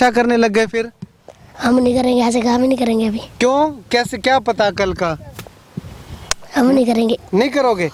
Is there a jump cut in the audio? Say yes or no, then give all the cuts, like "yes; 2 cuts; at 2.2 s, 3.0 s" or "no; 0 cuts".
no; 0 cuts